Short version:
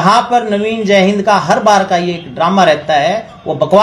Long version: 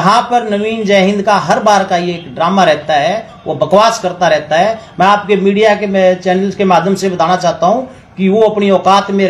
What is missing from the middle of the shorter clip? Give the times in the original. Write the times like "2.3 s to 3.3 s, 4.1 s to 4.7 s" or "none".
none